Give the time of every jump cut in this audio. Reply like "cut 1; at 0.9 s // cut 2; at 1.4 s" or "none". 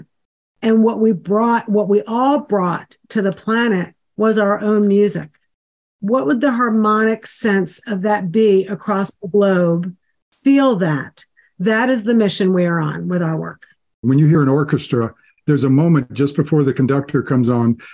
cut 1; at 14.0 s // cut 2; at 15.3 s